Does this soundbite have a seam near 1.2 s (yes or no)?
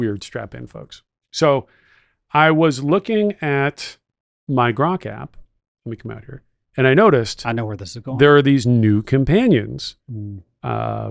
no